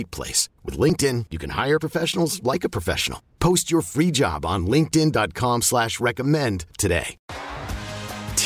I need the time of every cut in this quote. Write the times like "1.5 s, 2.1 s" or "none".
7.2 s